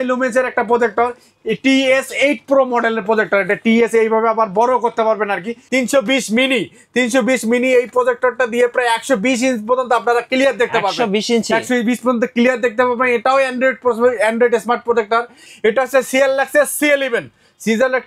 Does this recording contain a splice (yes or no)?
yes